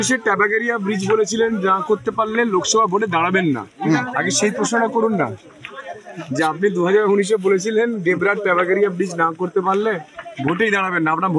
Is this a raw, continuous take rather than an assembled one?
yes; 0 cuts

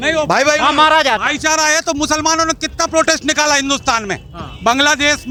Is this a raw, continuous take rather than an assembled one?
yes; 0 cuts

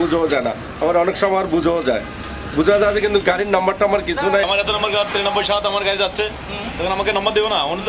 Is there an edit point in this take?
no; 0 cuts

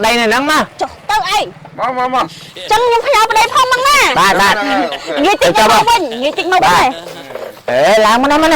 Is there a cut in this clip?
yes; 1 cut; at 2.5 s

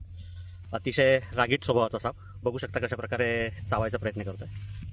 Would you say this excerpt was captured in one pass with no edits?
yes; 0 cuts

